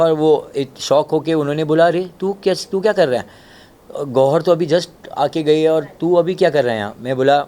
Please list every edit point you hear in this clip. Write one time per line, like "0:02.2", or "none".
none